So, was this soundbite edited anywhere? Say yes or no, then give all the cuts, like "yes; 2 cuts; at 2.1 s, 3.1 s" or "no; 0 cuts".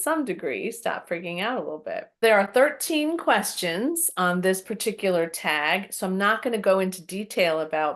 yes; 1 cut; at 2.2 s